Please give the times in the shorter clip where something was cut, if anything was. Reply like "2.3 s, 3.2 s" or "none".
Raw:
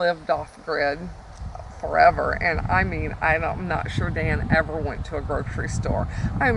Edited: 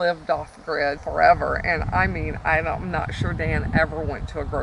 1.0 s